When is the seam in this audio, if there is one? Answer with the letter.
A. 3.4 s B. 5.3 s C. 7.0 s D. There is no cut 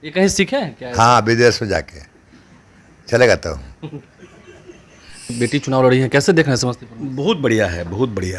B